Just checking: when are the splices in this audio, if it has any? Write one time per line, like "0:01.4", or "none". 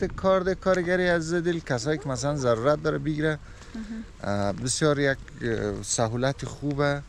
none